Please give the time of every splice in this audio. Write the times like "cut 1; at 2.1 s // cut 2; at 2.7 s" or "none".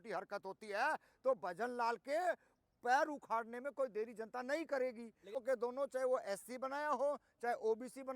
cut 1; at 5.4 s